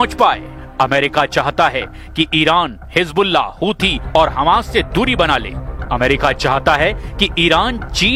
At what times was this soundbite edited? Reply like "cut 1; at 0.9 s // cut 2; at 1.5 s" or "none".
none